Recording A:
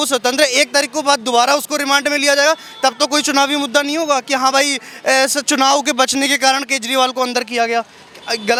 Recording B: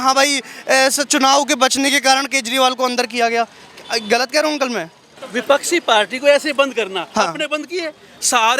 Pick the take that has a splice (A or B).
B